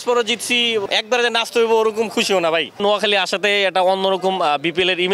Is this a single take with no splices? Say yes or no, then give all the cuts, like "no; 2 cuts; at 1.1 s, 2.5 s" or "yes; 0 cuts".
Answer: no; 2 cuts; at 0.8 s, 2.8 s